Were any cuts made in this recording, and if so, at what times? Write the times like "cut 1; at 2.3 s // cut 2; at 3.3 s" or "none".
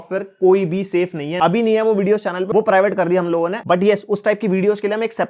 cut 1; at 1.4 s // cut 2; at 3.6 s